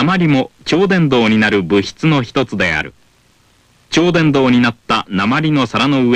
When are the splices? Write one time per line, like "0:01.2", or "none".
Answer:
0:05.1

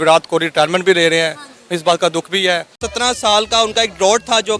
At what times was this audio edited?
0:02.9

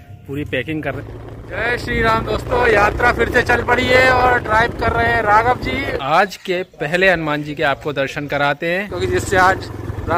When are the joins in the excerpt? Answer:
0:01.0
0:06.0
0:08.9

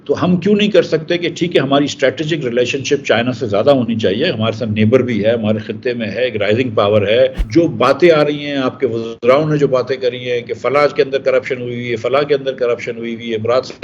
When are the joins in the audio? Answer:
0:07.4

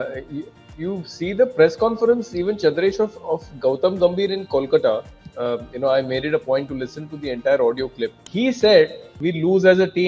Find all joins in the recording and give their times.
0:08.2
0:09.1

